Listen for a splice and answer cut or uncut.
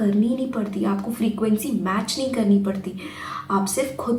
uncut